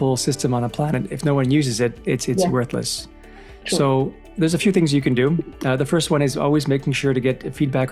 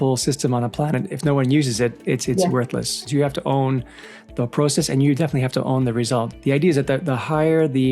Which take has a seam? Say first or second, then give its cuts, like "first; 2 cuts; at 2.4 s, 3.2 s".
second; 2 cuts; at 3.0 s, 6.3 s